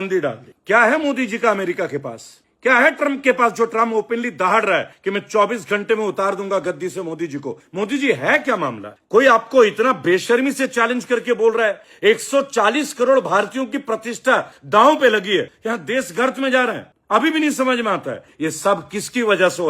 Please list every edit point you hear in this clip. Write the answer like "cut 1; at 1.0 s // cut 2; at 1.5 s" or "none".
cut 1; at 15.5 s // cut 2; at 18.3 s